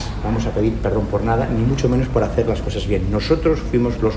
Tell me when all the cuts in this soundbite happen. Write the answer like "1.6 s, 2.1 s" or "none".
none